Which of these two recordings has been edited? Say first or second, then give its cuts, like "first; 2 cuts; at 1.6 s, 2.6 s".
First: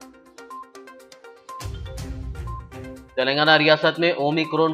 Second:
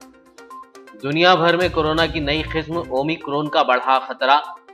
second; 1 cut; at 0.9 s